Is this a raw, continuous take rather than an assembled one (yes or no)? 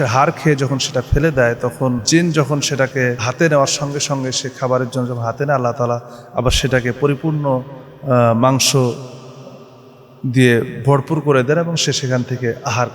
no